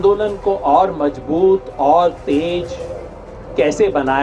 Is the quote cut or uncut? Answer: uncut